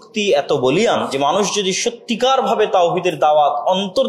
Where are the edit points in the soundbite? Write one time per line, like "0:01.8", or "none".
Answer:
0:00.9